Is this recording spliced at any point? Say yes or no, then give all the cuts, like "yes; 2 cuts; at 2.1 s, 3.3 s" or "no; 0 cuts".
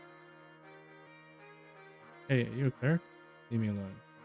yes; 1 cut; at 1.1 s